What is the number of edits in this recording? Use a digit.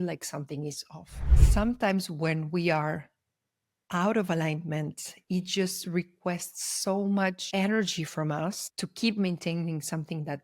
1